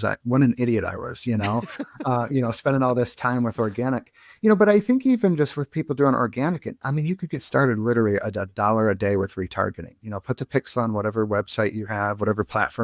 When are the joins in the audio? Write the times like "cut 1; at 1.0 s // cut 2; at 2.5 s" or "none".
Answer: none